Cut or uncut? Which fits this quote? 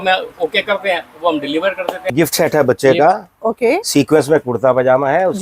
cut